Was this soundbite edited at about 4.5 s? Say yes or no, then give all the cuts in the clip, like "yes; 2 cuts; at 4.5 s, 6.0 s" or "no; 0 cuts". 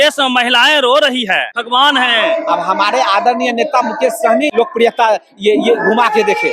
yes; 2 cuts; at 1.5 s, 4.5 s